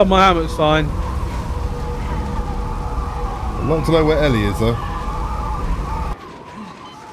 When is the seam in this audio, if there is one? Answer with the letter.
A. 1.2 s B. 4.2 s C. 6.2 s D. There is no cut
C